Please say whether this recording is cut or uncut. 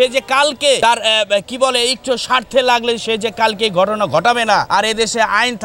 cut